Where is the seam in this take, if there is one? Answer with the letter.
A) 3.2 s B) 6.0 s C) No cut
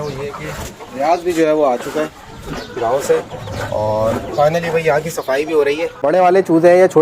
B